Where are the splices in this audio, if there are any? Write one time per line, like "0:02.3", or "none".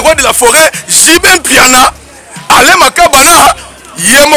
none